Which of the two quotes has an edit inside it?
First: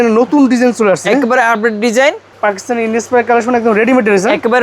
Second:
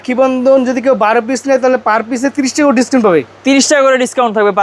first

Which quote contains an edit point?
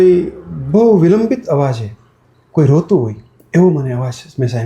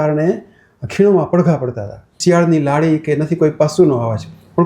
second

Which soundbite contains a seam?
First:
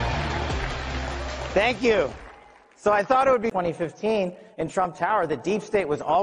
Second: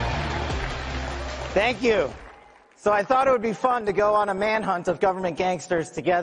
second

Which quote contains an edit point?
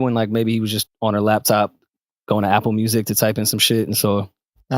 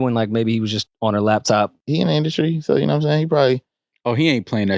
second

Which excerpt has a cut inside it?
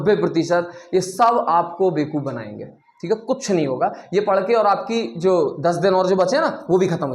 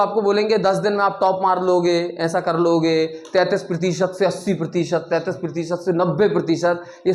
first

